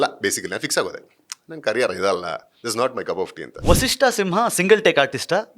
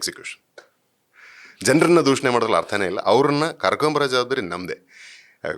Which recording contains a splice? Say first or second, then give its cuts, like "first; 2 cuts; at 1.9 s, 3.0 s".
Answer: first; 1 cut; at 3.5 s